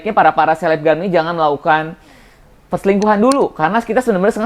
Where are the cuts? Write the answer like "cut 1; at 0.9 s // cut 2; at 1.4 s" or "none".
none